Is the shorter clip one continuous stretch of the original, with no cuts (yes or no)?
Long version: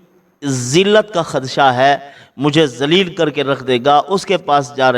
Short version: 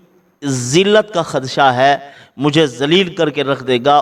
yes